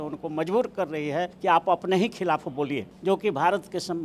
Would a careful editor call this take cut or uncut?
cut